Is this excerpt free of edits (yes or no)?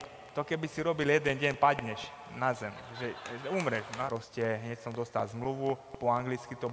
no